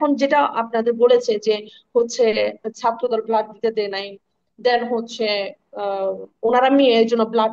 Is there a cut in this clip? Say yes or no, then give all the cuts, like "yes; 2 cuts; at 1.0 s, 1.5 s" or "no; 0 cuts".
no; 0 cuts